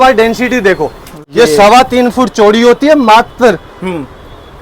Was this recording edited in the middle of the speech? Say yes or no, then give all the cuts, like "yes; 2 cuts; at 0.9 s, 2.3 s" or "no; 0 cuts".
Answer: yes; 1 cut; at 1.2 s